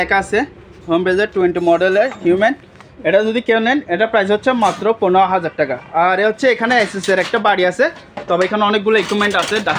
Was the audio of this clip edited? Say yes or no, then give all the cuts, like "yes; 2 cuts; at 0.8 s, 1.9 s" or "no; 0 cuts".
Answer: no; 0 cuts